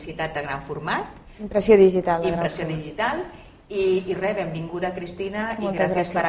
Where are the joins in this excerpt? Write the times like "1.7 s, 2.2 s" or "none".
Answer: 5.2 s